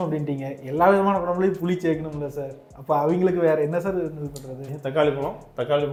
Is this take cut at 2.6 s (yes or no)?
no